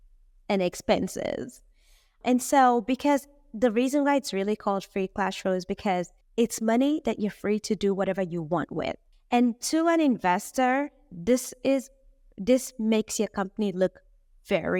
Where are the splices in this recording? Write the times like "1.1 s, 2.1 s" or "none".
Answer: none